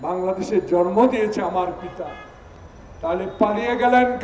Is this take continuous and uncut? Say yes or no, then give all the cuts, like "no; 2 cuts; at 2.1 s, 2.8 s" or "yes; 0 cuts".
yes; 0 cuts